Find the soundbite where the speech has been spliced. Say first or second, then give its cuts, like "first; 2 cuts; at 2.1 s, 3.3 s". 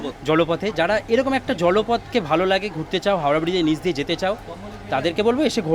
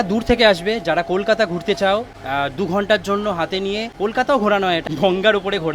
second; 3 cuts; at 2.2 s, 3.9 s, 4.9 s